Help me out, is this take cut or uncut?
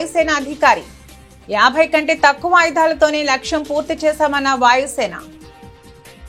cut